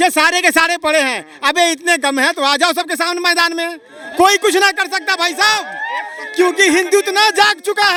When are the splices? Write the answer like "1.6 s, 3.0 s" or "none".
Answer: none